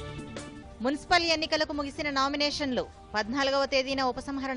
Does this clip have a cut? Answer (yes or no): no